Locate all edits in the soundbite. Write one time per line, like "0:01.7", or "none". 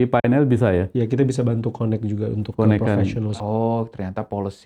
0:03.3